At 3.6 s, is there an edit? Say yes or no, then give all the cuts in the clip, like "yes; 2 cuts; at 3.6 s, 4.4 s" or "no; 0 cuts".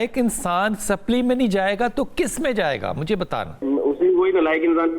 yes; 1 cut; at 3.6 s